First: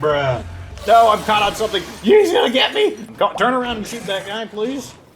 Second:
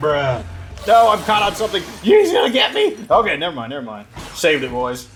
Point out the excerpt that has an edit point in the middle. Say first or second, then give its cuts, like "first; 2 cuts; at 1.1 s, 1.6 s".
first; 1 cut; at 3.0 s